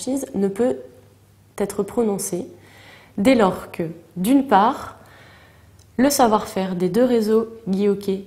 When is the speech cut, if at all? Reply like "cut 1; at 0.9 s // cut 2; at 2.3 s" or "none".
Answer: none